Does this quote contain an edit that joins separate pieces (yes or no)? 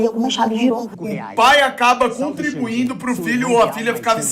yes